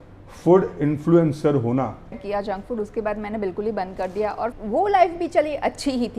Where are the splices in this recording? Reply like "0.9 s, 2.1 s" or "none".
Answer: 2.2 s, 4.6 s

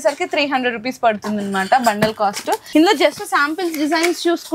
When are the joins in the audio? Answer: 2.7 s

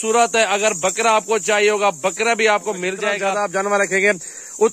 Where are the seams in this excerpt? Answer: 3.2 s

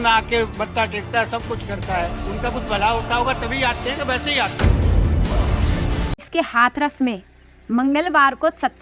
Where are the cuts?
6.3 s

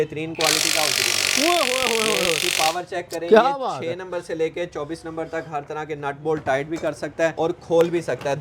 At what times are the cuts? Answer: 7.3 s

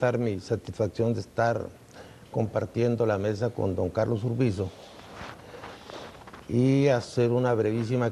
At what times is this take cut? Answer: none

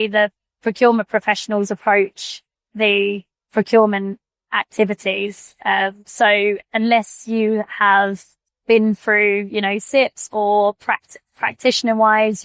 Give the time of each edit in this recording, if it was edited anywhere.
none

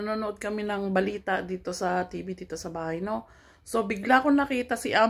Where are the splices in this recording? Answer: none

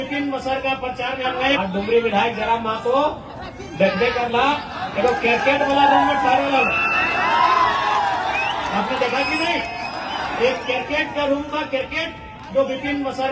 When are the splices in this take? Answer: 1.6 s

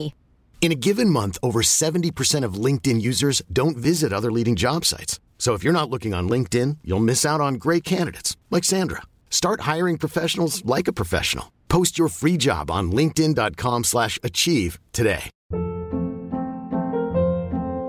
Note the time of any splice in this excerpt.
none

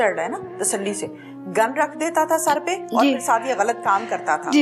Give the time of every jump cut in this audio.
none

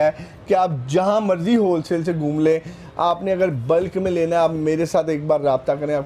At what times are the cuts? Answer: none

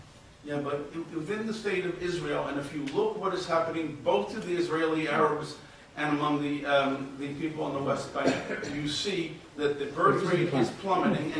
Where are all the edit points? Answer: 2.0 s

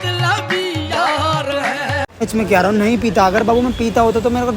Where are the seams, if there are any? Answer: 2.3 s

